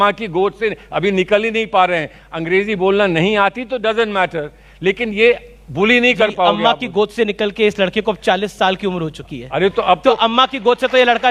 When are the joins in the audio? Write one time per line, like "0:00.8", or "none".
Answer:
none